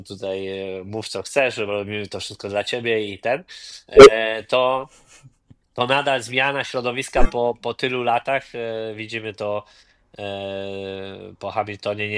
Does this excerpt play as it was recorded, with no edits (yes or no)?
yes